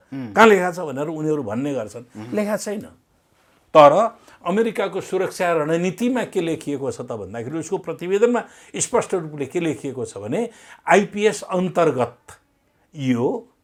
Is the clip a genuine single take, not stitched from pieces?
yes; 0 cuts

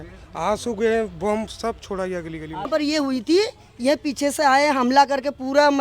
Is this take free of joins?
no; 1 cut; at 2.7 s

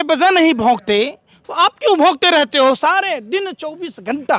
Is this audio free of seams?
yes; 0 cuts

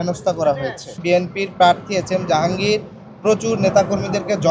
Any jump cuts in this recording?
yes; 1 cut; at 1.0 s

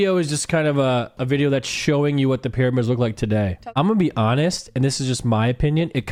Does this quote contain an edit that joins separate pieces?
no; 0 cuts

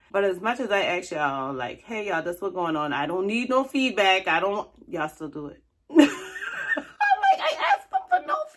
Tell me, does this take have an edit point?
no; 0 cuts

